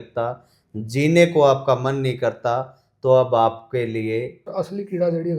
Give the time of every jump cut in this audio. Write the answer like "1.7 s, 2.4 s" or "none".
4.5 s